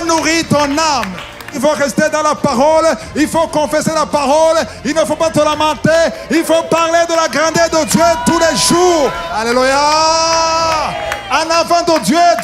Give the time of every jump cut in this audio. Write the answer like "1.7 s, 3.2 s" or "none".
1.5 s, 9.3 s